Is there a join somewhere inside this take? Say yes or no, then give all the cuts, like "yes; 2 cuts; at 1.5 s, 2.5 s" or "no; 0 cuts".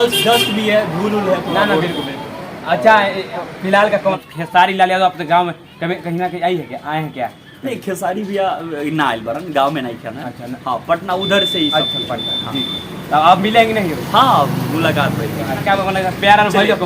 yes; 2 cuts; at 4.2 s, 15.6 s